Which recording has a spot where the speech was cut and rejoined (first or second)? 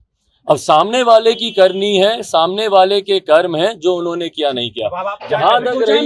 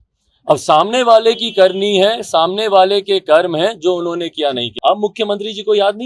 second